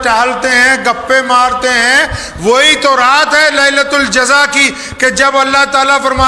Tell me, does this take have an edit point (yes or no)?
no